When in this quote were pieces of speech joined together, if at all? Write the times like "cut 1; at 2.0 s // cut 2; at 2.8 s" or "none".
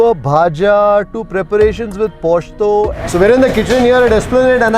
cut 1; at 3.0 s